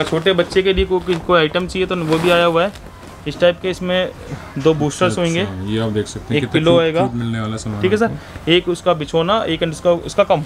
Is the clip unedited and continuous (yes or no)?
yes